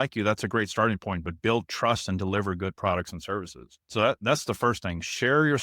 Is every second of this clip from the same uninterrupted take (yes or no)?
no